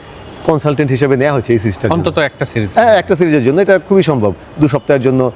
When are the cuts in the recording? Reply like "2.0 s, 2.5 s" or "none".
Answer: none